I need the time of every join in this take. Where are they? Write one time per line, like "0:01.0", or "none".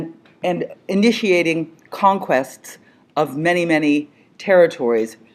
0:03.8